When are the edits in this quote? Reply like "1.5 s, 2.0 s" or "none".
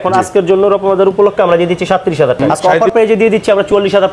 2.4 s